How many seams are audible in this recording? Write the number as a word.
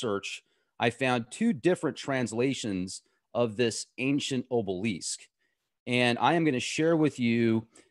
zero